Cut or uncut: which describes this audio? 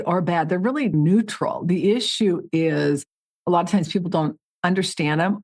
cut